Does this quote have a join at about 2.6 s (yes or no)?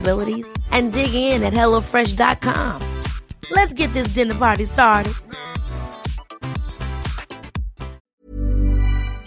no